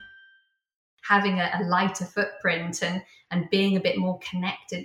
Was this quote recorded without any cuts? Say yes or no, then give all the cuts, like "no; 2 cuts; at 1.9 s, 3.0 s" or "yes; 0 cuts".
no; 1 cut; at 0.9 s